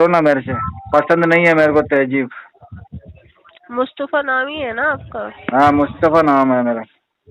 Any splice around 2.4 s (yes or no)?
no